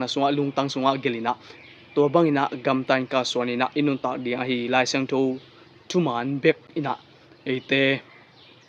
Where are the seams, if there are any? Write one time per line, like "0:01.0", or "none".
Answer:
0:06.6